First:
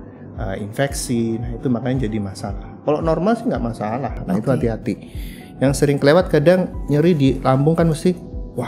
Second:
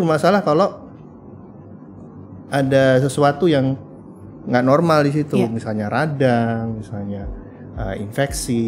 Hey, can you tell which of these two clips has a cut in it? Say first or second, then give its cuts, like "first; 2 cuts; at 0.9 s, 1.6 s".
first; 1 cut; at 4.2 s